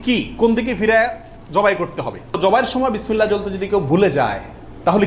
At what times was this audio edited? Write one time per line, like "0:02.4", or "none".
0:02.4